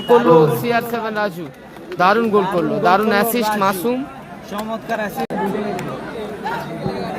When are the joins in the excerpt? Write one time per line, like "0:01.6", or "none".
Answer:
0:05.3

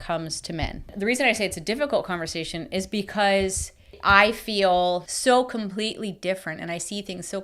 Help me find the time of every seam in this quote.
0:00.9
0:04.0
0:05.1

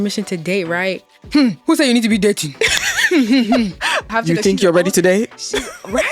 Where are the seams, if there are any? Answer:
0:01.2
0:04.1

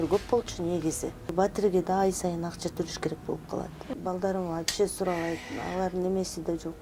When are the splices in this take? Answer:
0:01.3
0:03.8

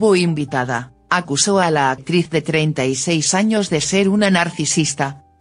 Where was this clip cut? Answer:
0:01.6

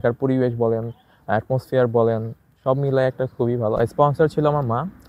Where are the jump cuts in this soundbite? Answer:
0:03.8

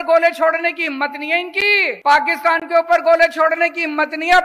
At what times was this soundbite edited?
0:02.0

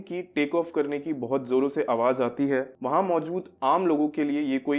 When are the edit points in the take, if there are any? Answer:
0:03.2

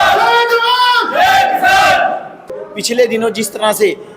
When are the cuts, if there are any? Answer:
0:02.7

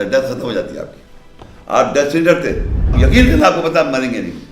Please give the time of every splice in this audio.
0:02.9

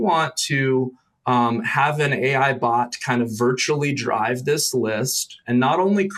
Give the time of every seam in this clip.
none

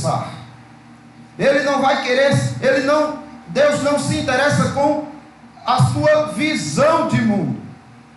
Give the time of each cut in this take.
none

